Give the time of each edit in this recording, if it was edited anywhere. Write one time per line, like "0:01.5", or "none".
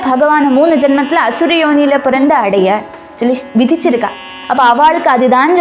none